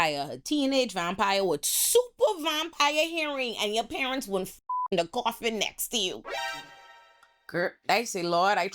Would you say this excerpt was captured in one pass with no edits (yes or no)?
yes